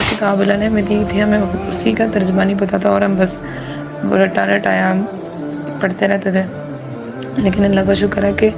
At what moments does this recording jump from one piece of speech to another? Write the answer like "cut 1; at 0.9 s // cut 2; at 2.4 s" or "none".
none